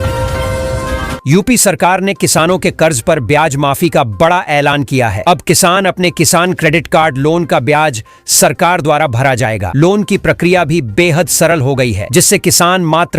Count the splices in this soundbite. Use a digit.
1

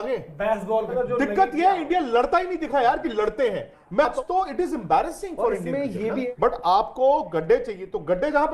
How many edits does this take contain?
3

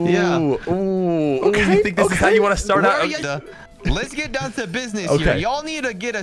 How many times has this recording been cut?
1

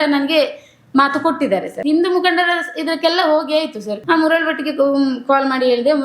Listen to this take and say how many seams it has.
2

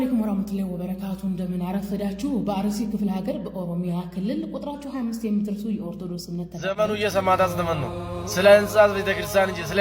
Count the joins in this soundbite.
1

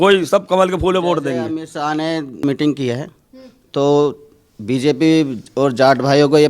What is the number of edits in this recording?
0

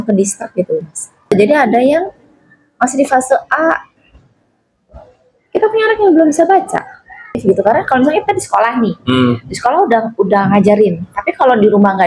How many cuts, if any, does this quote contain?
2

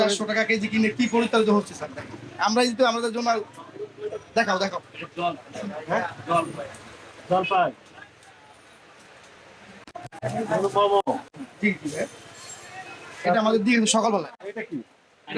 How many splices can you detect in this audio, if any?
0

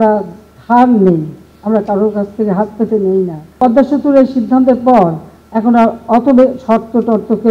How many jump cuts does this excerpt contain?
1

